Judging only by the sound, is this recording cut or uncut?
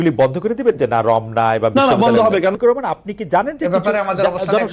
cut